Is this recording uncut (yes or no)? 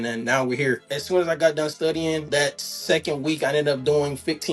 no